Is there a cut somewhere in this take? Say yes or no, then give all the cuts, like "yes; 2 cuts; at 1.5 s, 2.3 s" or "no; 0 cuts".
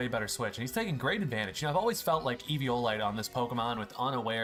no; 0 cuts